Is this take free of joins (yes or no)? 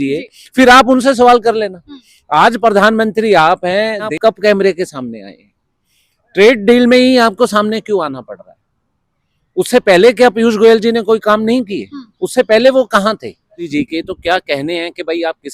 no